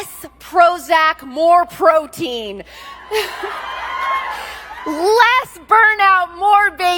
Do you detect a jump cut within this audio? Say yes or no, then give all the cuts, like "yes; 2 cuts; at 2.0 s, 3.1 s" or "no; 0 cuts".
no; 0 cuts